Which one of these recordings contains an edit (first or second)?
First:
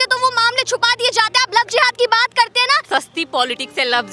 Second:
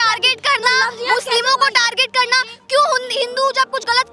first